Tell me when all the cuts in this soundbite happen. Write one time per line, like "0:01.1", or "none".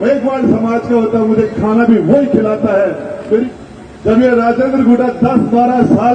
0:03.5